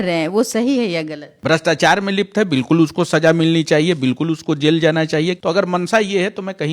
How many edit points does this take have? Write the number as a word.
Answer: two